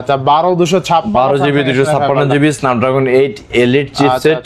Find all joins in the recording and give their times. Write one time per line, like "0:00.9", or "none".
none